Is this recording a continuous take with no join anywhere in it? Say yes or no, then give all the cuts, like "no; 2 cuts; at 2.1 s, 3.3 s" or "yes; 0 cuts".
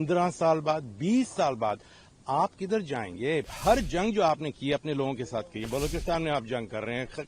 no; 2 cuts; at 3.5 s, 5.6 s